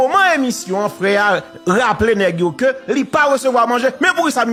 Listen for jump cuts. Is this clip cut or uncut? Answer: uncut